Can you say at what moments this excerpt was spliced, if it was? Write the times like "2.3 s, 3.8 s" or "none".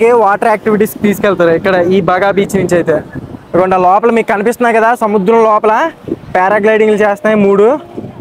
none